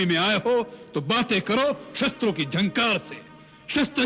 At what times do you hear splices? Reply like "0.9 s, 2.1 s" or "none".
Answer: none